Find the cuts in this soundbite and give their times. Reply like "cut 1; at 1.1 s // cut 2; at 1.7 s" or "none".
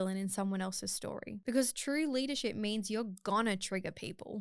cut 1; at 1.3 s